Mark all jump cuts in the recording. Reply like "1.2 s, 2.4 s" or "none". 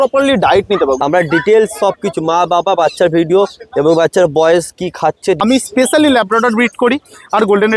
1.0 s, 5.4 s